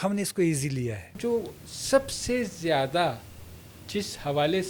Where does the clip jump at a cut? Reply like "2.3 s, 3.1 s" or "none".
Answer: 1.2 s